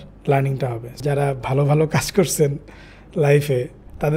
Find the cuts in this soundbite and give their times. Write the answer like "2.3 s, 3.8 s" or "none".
0.9 s